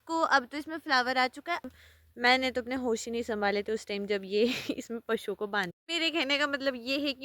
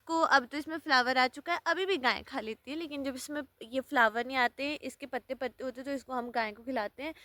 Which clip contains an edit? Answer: first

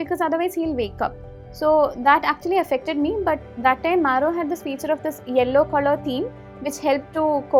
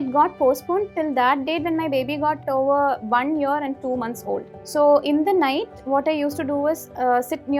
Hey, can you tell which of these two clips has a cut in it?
second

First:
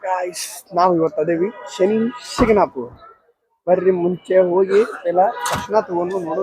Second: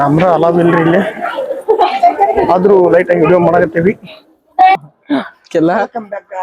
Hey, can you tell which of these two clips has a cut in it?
second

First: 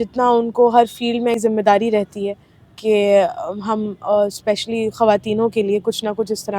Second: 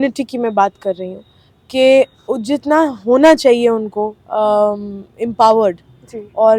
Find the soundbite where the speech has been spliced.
first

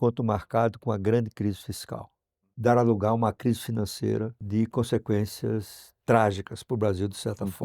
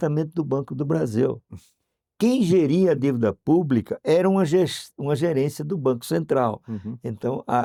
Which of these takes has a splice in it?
first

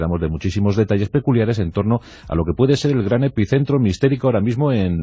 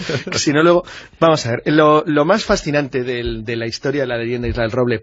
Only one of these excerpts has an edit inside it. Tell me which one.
second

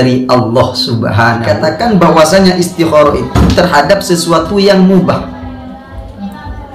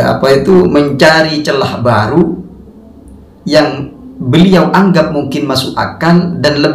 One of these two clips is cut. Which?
first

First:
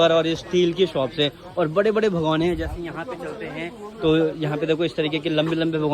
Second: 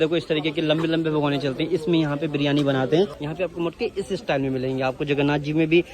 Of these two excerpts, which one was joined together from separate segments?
second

